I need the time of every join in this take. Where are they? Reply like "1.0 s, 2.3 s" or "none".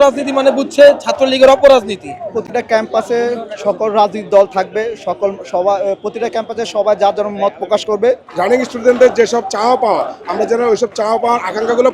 2.3 s, 8.3 s